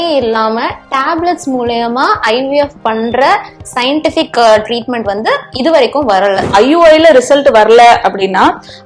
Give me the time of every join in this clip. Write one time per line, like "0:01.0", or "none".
0:06.5